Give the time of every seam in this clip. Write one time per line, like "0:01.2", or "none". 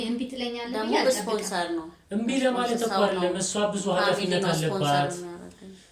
none